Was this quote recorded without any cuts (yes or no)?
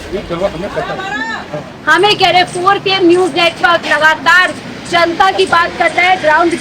no